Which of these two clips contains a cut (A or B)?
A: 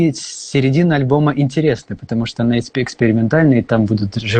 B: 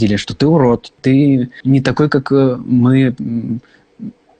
B